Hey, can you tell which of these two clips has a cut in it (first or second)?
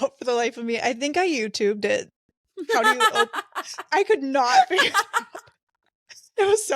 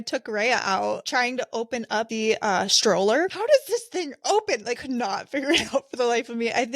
second